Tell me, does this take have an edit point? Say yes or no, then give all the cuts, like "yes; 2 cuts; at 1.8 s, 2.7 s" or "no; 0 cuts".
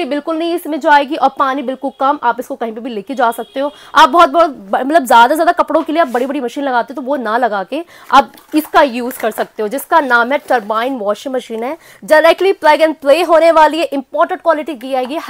no; 0 cuts